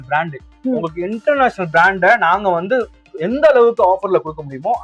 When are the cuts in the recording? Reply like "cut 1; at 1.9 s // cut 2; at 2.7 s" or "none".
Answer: none